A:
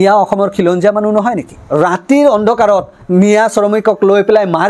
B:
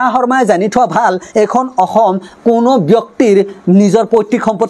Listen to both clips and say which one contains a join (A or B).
A